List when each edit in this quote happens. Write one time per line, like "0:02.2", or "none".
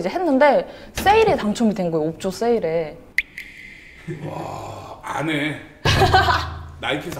none